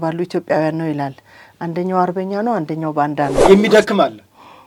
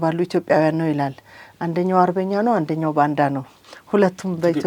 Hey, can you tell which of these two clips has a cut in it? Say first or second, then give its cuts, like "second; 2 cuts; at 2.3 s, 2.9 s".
first; 1 cut; at 3.4 s